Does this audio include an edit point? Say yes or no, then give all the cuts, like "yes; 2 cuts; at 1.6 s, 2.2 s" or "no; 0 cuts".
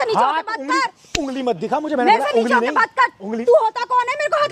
no; 0 cuts